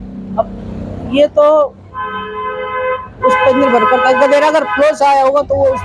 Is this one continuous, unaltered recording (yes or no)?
yes